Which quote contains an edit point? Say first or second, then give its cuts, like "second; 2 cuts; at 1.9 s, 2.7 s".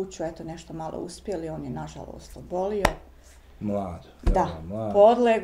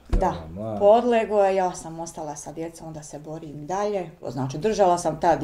second; 1 cut; at 4.2 s